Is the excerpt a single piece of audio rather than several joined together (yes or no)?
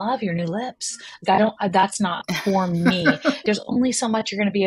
no